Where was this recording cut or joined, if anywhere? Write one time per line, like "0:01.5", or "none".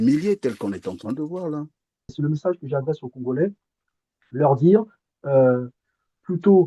0:02.1